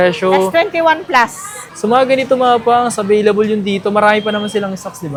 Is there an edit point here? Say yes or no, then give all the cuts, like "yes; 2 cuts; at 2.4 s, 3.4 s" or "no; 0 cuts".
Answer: no; 0 cuts